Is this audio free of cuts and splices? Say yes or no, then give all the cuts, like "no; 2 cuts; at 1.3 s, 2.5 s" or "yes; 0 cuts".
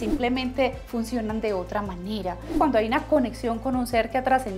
no; 1 cut; at 2.5 s